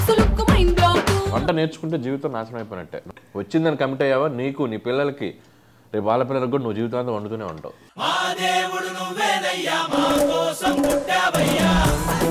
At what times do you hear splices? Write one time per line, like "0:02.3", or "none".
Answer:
0:03.1